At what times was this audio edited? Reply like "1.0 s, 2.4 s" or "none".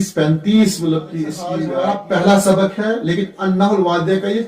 1.6 s